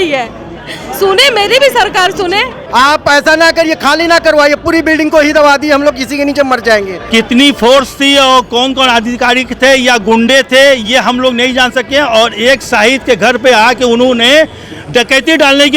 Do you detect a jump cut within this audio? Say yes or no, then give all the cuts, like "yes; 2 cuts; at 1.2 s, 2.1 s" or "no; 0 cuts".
yes; 2 cuts; at 2.6 s, 7.0 s